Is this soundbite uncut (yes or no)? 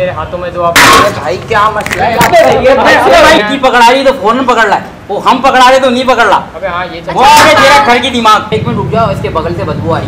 no